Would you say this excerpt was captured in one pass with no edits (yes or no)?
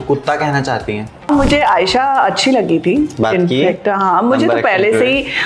no